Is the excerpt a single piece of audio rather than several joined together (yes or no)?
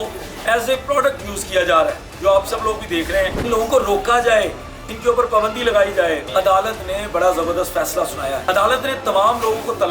no